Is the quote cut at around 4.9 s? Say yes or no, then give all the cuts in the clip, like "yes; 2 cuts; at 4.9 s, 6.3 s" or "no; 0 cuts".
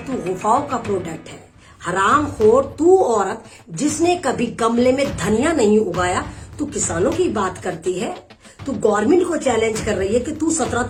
no; 0 cuts